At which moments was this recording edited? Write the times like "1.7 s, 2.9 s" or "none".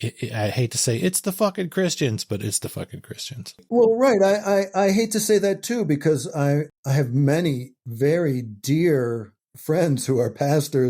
3.6 s, 6.7 s